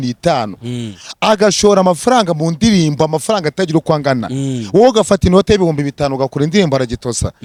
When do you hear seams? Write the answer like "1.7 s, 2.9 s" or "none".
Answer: none